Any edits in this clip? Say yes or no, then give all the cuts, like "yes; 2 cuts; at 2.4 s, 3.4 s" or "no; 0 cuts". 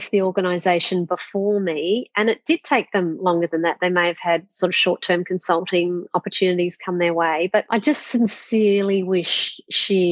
no; 0 cuts